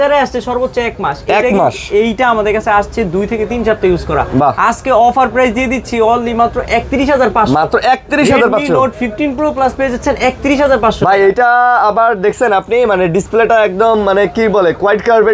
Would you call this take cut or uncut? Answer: uncut